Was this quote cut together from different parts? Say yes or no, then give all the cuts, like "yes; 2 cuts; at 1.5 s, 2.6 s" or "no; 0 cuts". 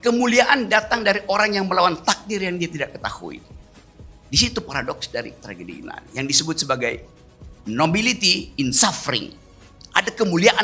no; 0 cuts